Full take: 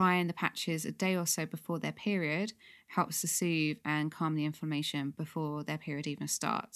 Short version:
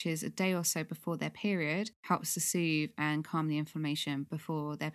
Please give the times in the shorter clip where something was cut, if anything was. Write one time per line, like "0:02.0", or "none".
0:02.0